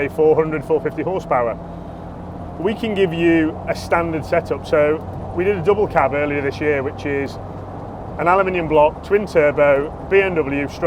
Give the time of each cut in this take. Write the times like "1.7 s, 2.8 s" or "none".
none